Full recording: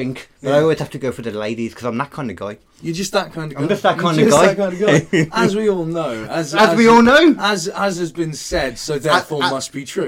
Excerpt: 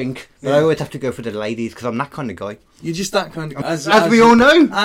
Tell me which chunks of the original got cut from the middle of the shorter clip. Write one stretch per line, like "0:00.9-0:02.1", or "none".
0:03.5-0:06.2